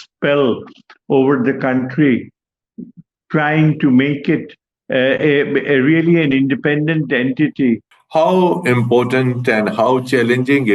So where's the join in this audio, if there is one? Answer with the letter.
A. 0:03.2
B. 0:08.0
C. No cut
B